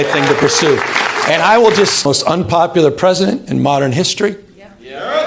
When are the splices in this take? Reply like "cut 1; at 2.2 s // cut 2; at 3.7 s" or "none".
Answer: cut 1; at 2.0 s